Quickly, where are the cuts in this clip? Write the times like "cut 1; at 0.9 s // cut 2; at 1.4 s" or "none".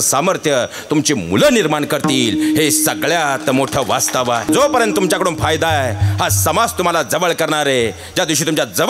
cut 1; at 4.5 s